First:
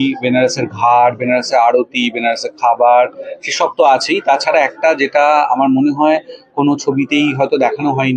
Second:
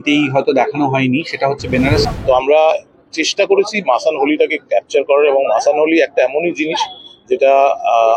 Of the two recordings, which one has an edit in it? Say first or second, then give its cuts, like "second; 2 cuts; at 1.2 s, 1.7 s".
second; 1 cut; at 2.0 s